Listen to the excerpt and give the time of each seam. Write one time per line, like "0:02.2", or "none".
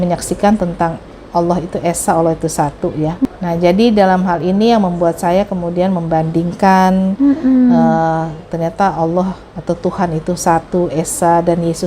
0:03.2